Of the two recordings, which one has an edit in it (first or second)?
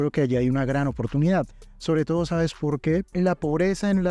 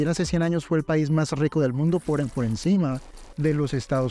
first